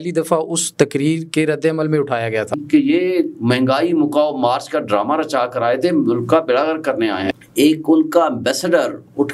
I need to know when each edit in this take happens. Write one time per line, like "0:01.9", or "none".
0:02.6
0:07.4